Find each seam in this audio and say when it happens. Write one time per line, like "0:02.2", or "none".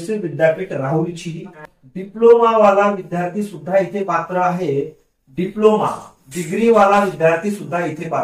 0:01.6